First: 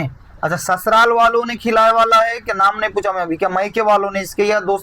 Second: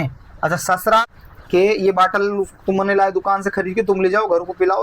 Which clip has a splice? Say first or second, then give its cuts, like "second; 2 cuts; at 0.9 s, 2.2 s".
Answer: second; 1 cut; at 1.0 s